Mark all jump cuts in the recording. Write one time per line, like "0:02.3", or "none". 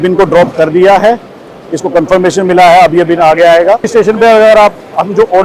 0:03.9